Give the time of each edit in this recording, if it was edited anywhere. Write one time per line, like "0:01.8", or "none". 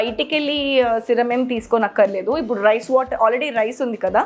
none